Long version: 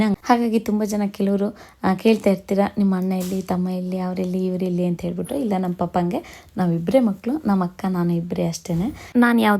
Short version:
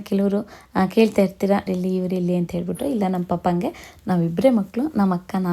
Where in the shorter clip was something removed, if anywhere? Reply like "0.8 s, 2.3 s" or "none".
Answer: 1.6 s